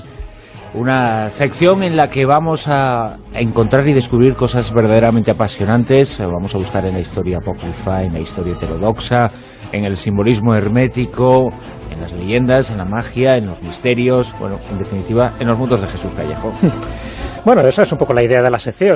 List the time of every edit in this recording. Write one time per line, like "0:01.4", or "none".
0:07.4